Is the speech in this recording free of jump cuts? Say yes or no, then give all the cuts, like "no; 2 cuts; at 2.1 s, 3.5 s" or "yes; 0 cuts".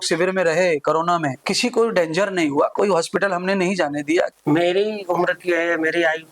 no; 2 cuts; at 1.4 s, 4.3 s